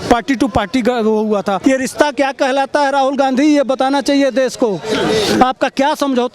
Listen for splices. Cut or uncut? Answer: cut